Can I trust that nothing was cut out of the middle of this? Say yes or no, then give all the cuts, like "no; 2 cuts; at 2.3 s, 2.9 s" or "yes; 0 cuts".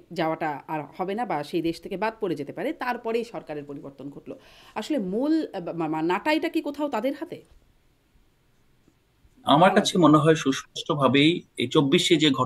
yes; 0 cuts